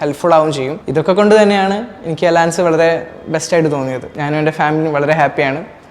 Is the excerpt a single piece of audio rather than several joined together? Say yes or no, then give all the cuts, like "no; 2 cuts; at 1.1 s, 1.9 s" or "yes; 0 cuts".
no; 1 cut; at 4.0 s